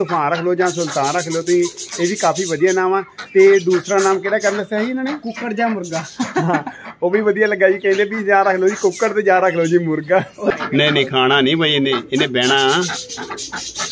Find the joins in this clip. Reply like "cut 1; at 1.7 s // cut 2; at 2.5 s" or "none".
cut 1; at 10.5 s